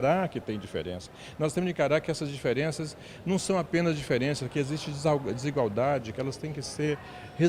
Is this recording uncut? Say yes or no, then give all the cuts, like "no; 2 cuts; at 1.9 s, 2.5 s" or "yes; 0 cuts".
yes; 0 cuts